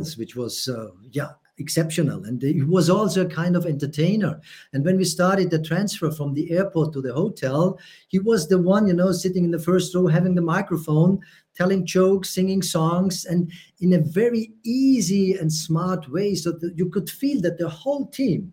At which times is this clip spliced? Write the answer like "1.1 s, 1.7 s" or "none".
none